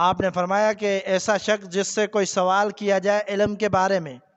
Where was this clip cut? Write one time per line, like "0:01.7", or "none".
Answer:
none